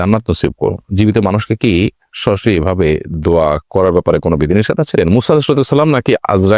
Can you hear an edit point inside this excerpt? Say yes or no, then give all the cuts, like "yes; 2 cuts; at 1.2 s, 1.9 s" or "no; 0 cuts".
yes; 1 cut; at 4.9 s